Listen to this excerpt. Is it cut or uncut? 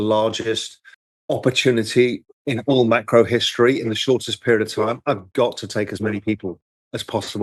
uncut